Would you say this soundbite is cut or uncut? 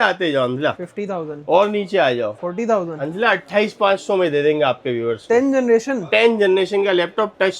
cut